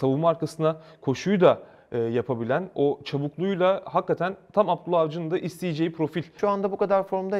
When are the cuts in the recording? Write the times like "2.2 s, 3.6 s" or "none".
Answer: 6.3 s